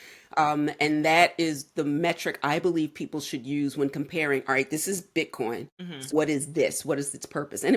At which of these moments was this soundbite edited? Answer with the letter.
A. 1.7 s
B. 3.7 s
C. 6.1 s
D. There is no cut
C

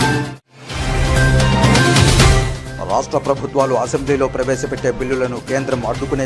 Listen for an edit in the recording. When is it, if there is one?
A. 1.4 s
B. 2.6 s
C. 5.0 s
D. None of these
B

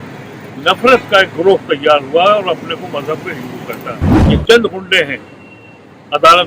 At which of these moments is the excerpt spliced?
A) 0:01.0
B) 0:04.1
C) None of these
B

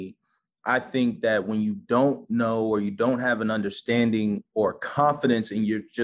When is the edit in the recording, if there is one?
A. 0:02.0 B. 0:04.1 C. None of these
C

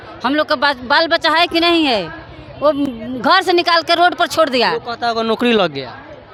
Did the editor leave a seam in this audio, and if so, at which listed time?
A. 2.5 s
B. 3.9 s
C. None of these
C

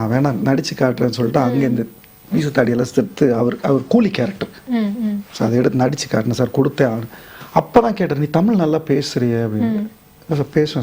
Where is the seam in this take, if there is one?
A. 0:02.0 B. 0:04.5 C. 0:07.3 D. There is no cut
D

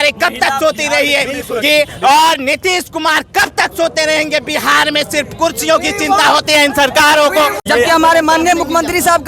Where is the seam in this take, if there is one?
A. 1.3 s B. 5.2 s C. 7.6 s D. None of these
C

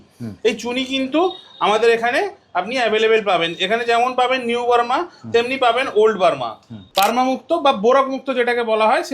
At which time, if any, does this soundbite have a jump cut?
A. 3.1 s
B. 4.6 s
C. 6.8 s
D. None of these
C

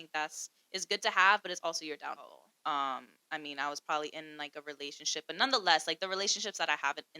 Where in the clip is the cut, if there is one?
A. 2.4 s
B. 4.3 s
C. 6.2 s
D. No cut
A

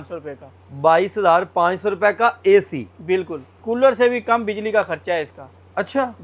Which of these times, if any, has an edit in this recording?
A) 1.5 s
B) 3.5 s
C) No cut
B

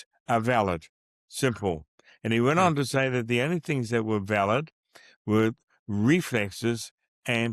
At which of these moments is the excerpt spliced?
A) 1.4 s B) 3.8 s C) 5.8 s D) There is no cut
D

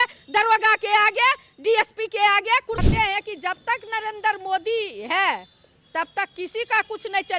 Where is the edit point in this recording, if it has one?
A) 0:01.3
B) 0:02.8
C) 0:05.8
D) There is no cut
B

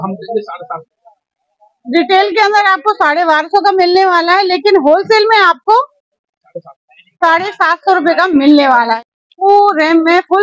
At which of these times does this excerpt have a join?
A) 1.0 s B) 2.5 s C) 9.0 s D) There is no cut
C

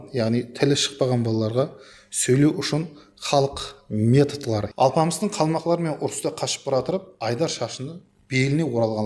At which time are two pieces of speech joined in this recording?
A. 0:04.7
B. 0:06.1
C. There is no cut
A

